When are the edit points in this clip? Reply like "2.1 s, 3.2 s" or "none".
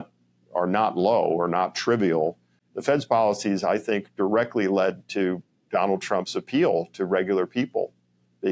2.6 s